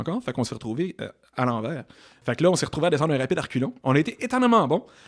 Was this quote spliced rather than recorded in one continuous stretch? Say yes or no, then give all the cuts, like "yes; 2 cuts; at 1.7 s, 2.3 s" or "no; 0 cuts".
yes; 2 cuts; at 2.2 s, 3.7 s